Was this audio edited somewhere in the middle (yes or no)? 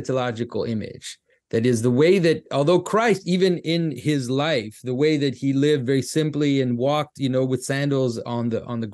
no